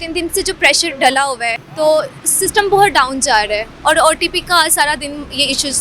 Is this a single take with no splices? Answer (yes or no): no